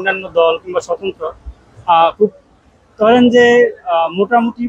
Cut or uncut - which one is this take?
uncut